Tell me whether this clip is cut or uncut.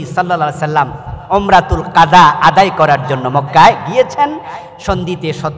uncut